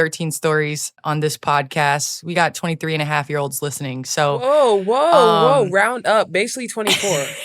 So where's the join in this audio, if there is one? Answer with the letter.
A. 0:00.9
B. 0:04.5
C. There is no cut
A